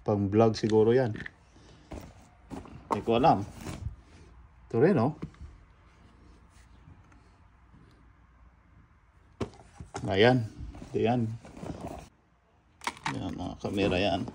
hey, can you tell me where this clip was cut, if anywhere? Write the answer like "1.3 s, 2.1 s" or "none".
12.1 s